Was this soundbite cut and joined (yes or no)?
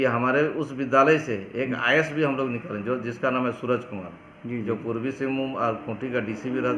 no